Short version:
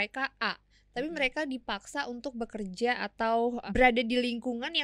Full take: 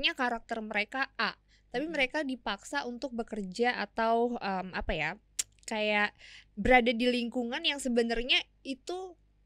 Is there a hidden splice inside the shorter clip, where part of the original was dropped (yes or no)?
yes